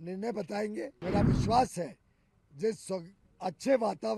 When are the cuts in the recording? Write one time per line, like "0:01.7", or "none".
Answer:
0:01.0